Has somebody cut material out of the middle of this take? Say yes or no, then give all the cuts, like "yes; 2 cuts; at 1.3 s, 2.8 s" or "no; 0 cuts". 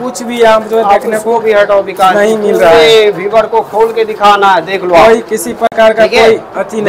no; 0 cuts